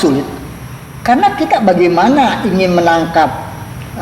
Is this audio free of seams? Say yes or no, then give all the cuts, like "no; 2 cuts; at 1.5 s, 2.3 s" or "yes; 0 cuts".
yes; 0 cuts